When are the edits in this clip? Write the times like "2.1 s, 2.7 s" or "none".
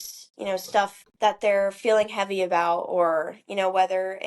1.0 s